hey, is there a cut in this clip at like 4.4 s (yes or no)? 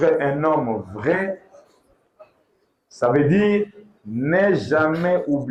no